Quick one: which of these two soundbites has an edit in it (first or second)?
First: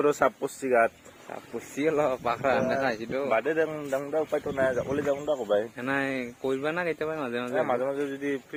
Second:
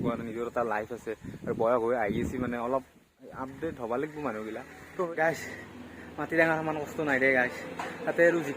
second